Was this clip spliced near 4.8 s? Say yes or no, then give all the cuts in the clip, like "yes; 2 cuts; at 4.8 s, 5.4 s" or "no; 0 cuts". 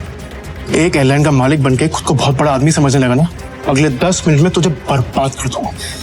no; 1 cut; at 3.5 s